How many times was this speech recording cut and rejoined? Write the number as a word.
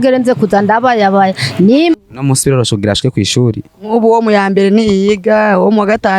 one